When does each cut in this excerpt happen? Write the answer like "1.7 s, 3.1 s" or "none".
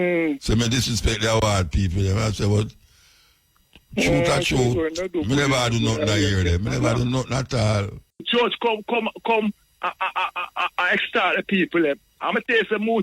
8.3 s

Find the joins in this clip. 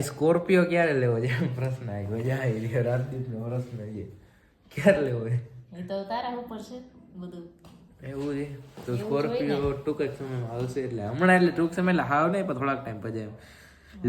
none

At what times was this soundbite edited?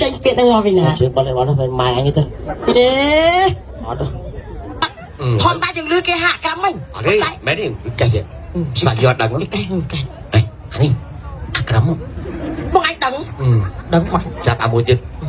4.8 s

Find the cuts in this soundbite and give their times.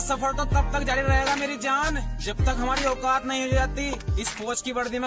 none

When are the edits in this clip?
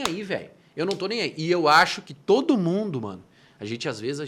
none

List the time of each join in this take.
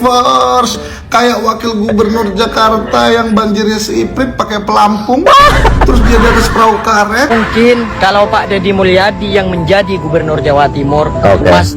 7.3 s

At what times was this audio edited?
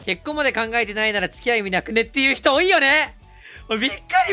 none

